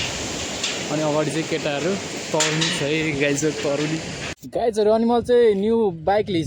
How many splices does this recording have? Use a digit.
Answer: 1